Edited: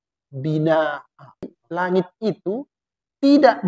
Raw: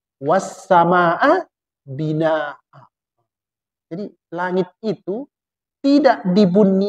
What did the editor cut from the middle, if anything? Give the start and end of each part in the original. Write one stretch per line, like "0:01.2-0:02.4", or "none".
0:03.1-0:04.2